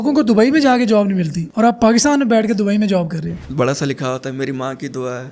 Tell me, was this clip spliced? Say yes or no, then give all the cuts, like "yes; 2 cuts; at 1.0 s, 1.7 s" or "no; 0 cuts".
yes; 2 cuts; at 1.4 s, 3.4 s